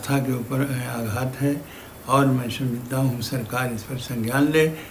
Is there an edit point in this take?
no; 0 cuts

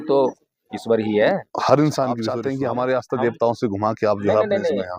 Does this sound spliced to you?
yes; 1 cut; at 2.4 s

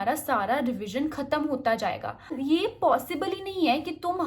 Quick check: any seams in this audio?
yes; 1 cut; at 2.4 s

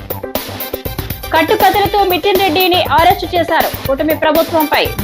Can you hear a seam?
no; 0 cuts

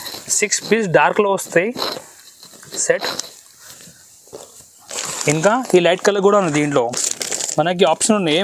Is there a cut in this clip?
no; 0 cuts

